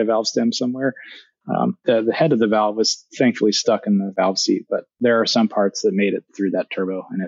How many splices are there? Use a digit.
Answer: 2